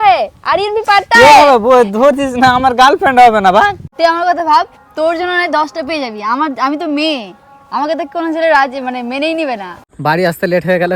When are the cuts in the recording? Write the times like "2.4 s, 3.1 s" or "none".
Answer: 3.8 s, 9.9 s